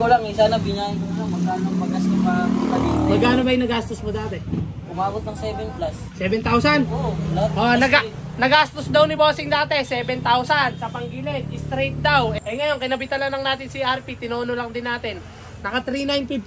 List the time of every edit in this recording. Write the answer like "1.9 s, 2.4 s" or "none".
12.4 s